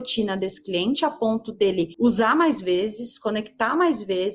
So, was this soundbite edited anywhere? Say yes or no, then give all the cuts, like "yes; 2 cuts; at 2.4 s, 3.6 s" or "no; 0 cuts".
yes; 1 cut; at 1.9 s